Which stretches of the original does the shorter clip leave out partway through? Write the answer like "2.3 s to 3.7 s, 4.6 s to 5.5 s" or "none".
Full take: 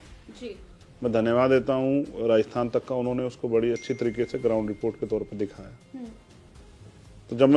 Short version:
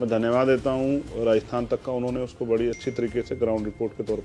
none